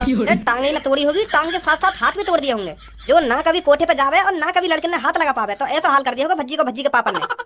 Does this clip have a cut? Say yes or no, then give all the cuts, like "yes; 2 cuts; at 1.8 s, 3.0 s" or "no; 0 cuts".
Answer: no; 0 cuts